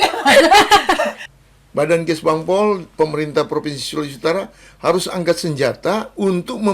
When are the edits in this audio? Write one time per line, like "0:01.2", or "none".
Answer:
0:01.2